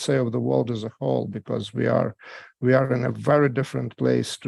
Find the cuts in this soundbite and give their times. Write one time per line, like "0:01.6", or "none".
none